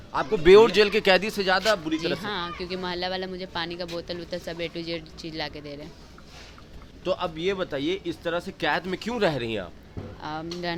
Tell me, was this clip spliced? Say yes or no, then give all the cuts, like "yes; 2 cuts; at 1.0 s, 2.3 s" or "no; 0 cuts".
no; 0 cuts